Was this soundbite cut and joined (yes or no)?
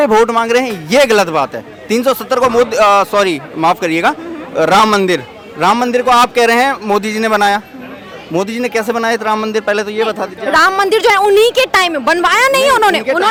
no